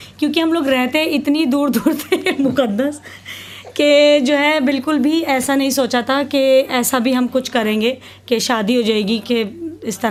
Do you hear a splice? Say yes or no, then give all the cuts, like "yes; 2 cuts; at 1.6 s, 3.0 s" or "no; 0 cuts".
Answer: no; 0 cuts